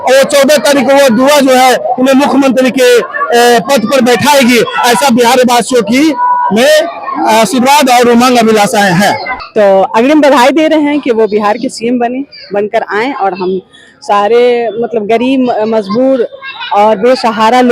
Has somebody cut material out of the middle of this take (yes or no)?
yes